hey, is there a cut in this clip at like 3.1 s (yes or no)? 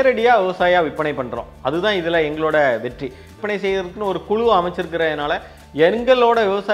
no